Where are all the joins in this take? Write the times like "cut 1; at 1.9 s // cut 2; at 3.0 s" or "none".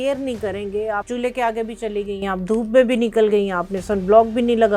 cut 1; at 1.1 s